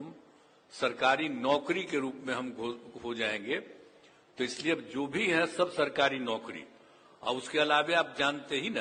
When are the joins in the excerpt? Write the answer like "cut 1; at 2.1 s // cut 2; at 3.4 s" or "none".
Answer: none